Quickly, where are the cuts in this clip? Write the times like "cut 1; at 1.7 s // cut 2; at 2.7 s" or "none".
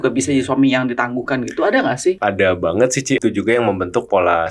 cut 1; at 2.2 s // cut 2; at 3.2 s